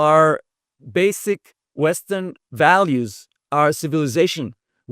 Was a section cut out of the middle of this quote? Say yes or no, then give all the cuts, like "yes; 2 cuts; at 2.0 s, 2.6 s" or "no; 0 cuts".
yes; 2 cuts; at 1.6 s, 2.4 s